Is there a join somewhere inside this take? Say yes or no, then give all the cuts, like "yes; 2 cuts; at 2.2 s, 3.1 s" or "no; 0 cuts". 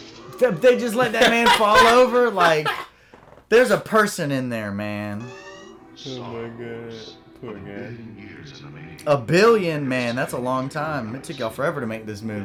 no; 0 cuts